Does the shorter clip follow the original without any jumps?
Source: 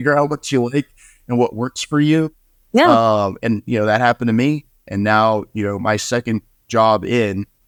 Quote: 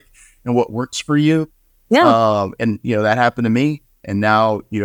yes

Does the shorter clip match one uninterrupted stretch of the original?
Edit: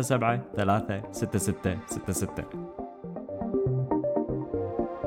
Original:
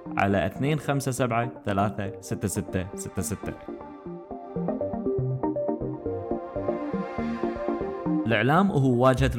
no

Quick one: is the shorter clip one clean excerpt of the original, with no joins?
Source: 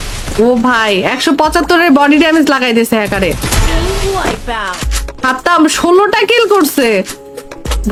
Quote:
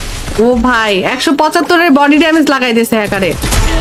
yes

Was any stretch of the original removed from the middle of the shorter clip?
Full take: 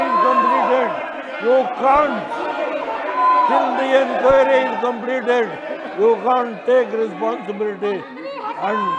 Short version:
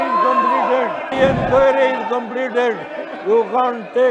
yes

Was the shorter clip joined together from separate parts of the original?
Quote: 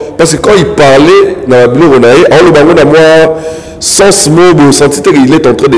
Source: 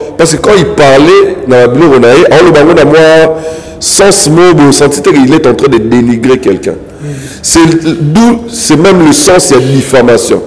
no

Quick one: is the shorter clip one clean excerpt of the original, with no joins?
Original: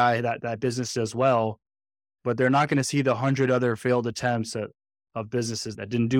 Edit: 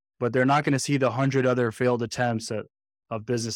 yes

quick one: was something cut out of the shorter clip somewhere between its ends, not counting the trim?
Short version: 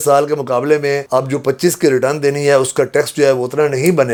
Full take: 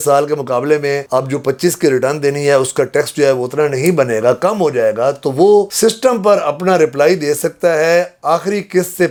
no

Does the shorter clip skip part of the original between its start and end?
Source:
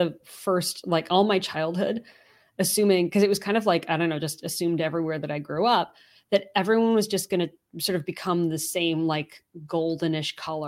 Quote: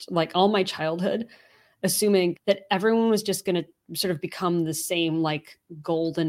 yes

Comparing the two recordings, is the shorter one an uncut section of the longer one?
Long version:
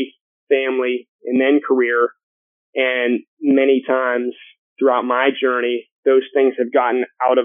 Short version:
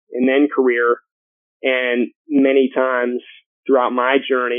yes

